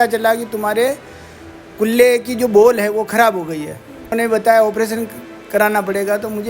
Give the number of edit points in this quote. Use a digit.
1